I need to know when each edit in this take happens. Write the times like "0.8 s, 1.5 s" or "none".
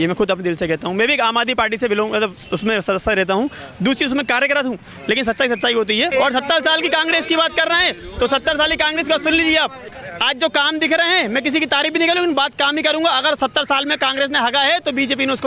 6.1 s, 9.9 s